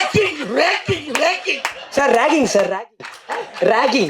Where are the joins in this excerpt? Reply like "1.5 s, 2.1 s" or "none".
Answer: none

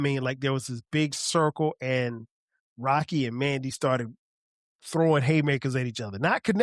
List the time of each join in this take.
none

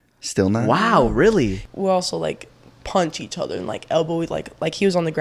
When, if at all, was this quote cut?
1.6 s

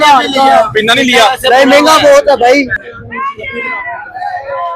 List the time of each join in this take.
2.8 s

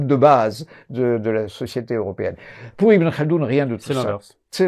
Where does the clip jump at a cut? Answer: none

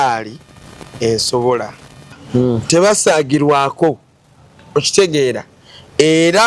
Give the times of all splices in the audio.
2.2 s

